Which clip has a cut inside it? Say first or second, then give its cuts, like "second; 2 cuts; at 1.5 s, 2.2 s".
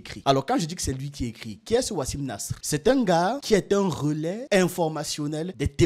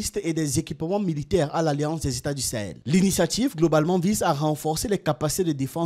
second; 1 cut; at 2.8 s